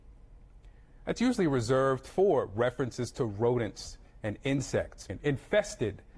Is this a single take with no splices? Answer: yes; 0 cuts

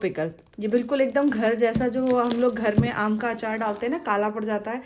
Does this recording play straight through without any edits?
yes; 0 cuts

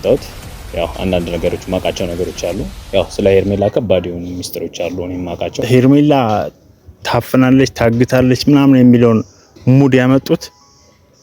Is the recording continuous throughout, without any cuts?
no; 1 cut; at 5.6 s

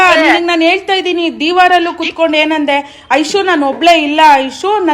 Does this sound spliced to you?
yes; 1 cut; at 3.4 s

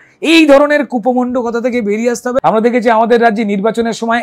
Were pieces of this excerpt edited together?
yes; 1 cut; at 2.4 s

